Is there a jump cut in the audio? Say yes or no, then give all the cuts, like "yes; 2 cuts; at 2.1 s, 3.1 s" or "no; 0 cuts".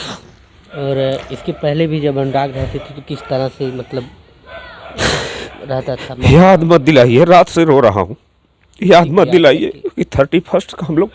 no; 0 cuts